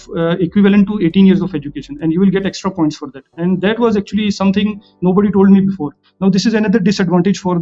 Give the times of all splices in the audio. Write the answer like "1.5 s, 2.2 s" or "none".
6.0 s